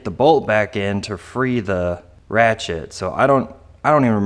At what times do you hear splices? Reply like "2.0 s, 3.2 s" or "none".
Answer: 2.1 s